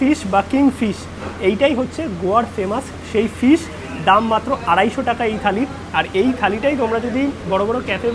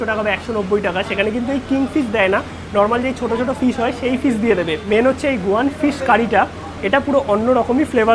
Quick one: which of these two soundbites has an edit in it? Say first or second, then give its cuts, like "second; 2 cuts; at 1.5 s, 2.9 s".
second; 1 cut; at 4.8 s